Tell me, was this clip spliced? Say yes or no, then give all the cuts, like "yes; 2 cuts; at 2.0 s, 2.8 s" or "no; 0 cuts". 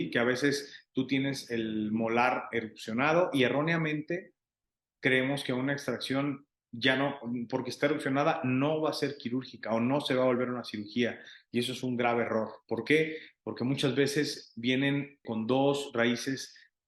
yes; 1 cut; at 15.2 s